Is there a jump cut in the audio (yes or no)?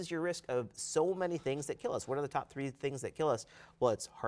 no